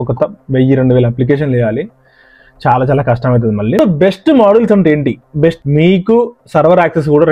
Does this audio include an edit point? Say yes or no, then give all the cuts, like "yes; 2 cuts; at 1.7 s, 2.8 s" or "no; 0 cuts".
yes; 2 cuts; at 3.8 s, 5.6 s